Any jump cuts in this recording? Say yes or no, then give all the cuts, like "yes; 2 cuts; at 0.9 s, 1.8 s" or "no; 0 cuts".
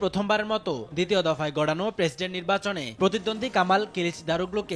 no; 0 cuts